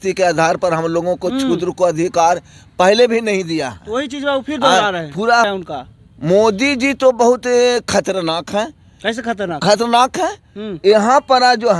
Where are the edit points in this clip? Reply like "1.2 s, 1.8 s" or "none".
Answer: 5.5 s